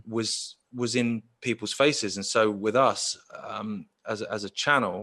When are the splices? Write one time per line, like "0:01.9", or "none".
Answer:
none

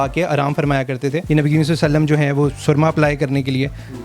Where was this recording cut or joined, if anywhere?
0:01.2

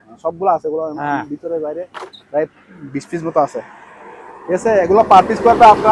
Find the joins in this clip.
none

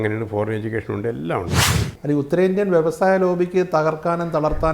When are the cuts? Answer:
0:01.8

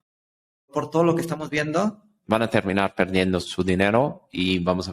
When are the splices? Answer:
0:02.1
0:03.5

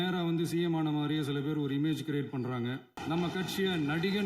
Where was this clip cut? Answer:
0:02.9

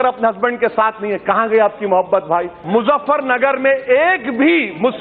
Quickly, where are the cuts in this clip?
0:02.6

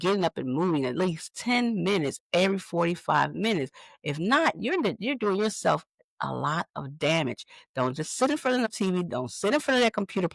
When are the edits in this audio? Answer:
none

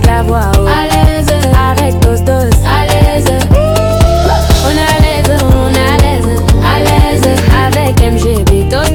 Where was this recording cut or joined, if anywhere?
none

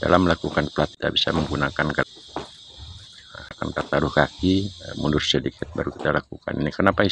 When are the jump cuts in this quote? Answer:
0:00.9
0:02.0
0:03.6

